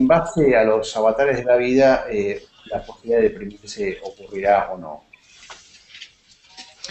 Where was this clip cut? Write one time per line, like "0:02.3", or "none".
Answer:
none